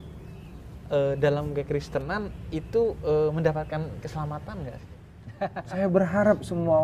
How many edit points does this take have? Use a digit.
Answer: 1